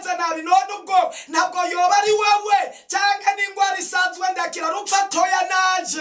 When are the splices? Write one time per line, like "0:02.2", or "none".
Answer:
none